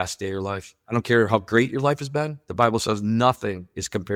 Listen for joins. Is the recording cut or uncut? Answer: uncut